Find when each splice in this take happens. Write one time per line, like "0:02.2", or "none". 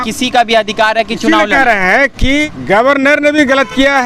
0:02.4